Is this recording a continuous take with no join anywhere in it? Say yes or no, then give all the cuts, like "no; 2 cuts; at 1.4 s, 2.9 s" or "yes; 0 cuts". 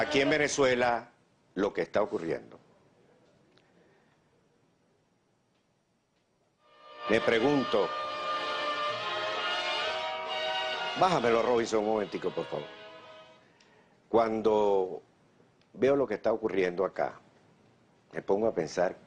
no; 1 cut; at 9.4 s